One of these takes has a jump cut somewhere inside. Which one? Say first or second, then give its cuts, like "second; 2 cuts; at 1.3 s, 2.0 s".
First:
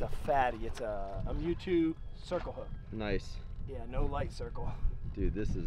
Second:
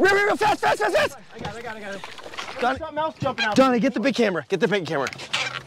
second; 1 cut; at 2.6 s